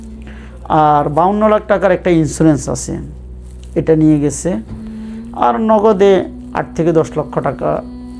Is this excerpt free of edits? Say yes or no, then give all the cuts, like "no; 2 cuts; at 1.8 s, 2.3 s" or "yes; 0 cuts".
yes; 0 cuts